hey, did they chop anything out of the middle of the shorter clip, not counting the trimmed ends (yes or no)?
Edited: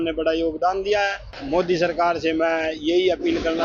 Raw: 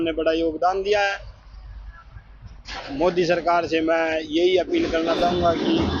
yes